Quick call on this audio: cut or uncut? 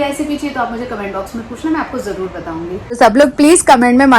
cut